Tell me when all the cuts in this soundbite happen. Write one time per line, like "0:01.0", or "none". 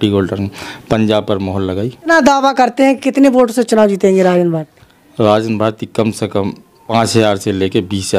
0:02.1
0:06.9